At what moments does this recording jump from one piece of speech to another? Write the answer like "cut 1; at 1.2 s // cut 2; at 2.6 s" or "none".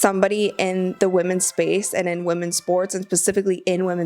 cut 1; at 0.9 s